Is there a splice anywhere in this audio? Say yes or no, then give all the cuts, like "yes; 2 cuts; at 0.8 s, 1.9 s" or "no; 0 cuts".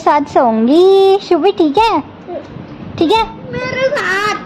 no; 0 cuts